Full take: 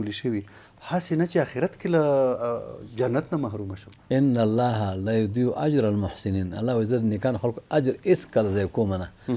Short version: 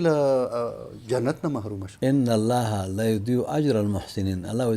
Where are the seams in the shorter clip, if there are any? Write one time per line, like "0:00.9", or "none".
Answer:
0:01.8